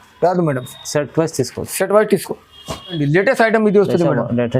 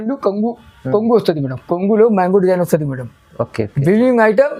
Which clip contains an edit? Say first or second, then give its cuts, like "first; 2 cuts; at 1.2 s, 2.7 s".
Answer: first; 1 cut; at 3.0 s